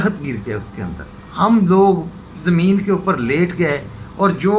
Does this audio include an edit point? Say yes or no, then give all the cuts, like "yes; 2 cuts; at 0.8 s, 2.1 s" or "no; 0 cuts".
no; 0 cuts